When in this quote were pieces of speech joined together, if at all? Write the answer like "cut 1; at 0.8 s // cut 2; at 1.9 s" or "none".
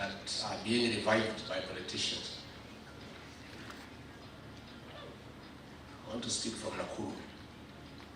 none